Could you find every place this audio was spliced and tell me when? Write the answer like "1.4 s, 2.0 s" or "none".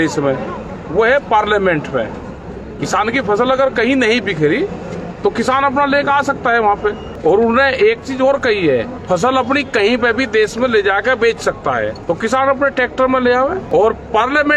7.1 s, 9.0 s, 12.0 s, 13.6 s